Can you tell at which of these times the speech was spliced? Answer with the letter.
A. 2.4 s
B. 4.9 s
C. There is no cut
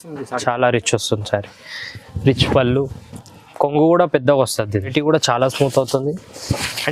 B